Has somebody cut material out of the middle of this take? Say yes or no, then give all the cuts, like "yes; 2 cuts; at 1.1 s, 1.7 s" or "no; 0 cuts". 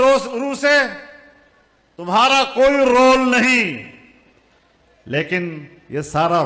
no; 0 cuts